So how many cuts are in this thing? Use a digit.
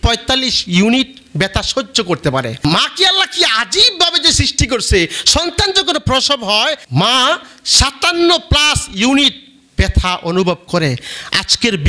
2